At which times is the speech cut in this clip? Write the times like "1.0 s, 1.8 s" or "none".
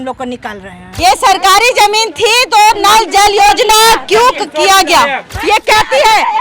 0.9 s, 5.3 s